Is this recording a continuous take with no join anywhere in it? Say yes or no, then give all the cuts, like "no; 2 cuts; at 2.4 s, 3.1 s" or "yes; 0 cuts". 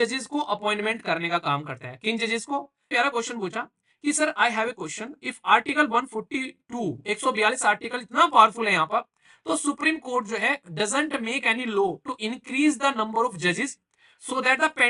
no; 1 cut; at 2.9 s